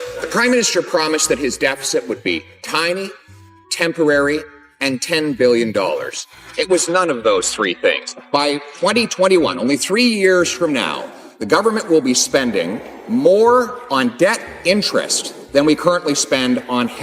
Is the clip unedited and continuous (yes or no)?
yes